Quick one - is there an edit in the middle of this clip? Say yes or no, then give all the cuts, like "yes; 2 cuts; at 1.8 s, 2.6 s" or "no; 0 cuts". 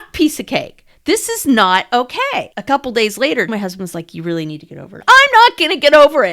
yes; 3 cuts; at 2.5 s, 3.5 s, 5.0 s